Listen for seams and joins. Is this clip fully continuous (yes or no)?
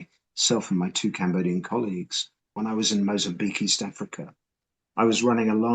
no